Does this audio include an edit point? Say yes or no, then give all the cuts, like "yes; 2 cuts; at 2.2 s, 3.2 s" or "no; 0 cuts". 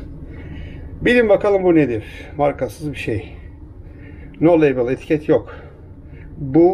no; 0 cuts